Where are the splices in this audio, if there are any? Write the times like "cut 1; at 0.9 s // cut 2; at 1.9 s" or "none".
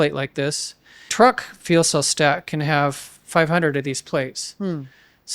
cut 1; at 1.1 s